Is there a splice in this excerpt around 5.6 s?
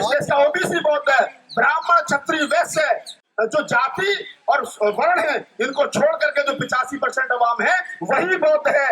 no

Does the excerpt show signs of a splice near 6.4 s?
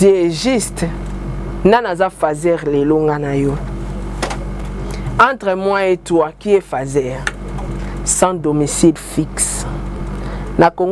no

